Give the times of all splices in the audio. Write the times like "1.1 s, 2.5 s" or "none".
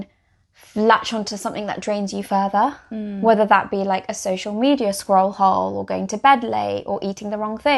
none